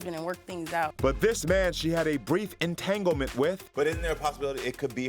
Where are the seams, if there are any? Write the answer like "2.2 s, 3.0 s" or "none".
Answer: 0.9 s, 3.6 s

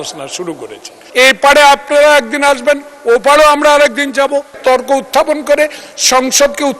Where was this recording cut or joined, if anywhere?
1.0 s, 4.6 s

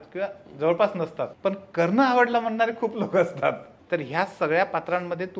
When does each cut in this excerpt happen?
1.3 s, 3.7 s

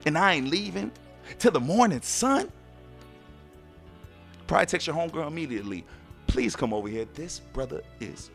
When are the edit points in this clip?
3.0 s, 4.5 s

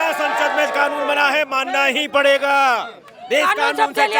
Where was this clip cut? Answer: none

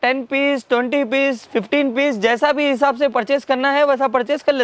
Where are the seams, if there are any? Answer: none

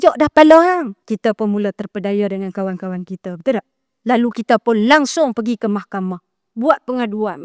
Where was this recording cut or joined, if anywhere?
1.0 s

